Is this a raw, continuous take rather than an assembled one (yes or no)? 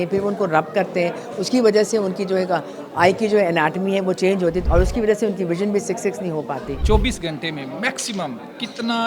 no